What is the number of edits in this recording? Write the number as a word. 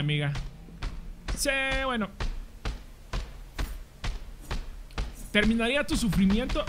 zero